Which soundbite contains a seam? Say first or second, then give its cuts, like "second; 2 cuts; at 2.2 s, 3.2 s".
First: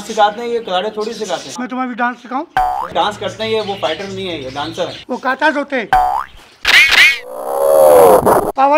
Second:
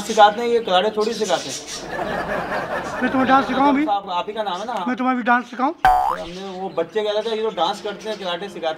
first; 3 cuts; at 1.5 s, 2.9 s, 5.0 s